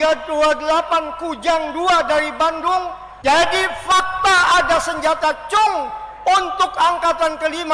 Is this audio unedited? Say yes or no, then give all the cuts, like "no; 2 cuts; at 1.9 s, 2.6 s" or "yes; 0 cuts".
no; 1 cut; at 3.0 s